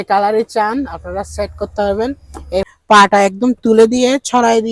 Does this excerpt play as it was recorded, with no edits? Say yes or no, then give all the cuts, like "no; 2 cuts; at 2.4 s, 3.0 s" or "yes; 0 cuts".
no; 1 cut; at 2.7 s